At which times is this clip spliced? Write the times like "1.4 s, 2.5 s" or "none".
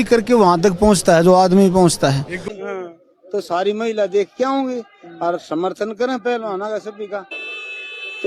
2.5 s, 7.3 s

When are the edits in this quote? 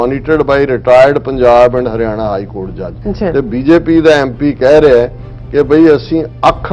3.0 s

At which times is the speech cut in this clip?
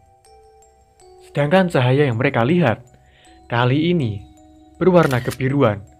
none

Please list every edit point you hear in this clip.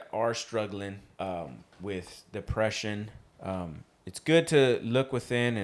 1.0 s, 3.2 s

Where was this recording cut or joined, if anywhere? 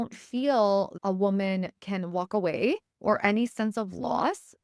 0.9 s, 2.9 s

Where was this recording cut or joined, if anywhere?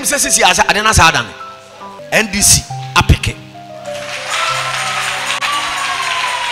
1.9 s

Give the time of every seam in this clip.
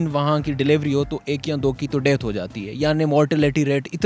none

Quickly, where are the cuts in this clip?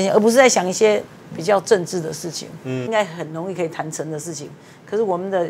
2.8 s

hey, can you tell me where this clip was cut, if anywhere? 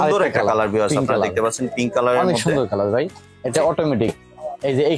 none

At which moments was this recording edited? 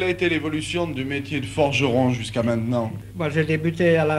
3.0 s

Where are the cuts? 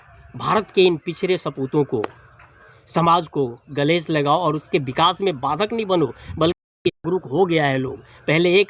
6.9 s

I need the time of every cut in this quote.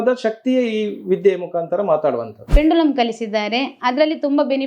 2.5 s

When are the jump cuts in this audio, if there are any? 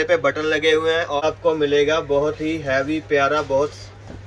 1.2 s

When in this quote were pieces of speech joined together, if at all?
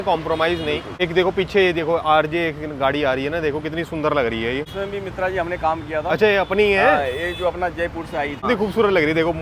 0.9 s, 4.7 s, 8.5 s

